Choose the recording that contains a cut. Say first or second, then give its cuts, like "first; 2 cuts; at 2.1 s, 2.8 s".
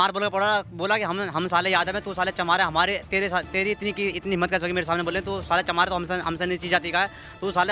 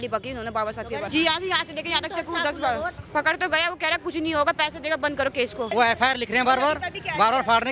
second; 3 cuts; at 1.1 s, 3.0 s, 5.7 s